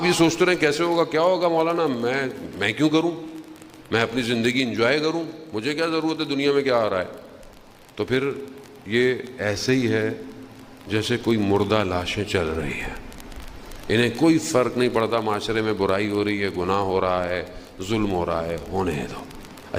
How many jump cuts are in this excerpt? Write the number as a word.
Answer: zero